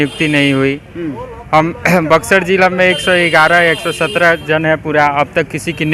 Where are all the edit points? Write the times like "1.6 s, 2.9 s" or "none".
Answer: none

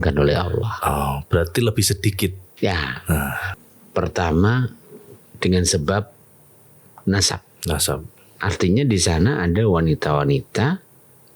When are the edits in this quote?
3.4 s

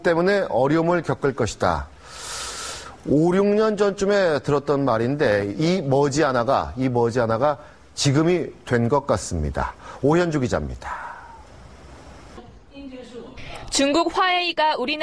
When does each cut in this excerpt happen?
2.3 s

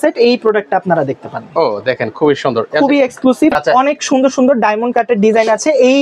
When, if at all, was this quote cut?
3.6 s

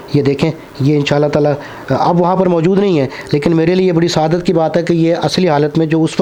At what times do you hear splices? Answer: none

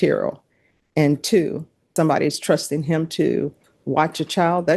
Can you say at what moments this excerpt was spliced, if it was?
1.9 s

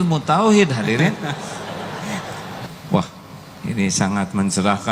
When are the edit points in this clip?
2.5 s

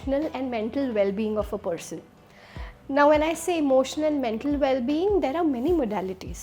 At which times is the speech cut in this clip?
none

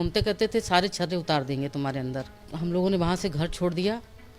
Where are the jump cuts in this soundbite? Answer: 2.4 s

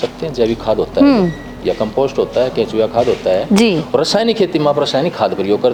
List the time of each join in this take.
none

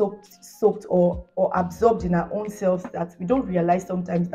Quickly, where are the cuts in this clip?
none

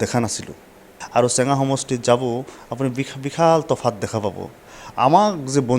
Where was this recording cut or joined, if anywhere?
1.0 s

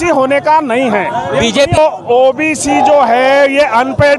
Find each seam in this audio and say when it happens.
1.8 s

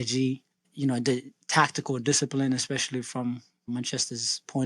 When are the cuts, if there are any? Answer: none

